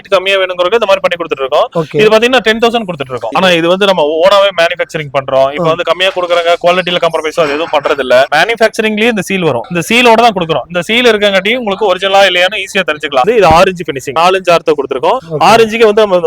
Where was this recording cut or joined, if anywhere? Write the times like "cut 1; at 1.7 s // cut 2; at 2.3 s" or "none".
cut 1; at 3.2 s // cut 2; at 8.3 s // cut 3; at 13.2 s // cut 4; at 14.2 s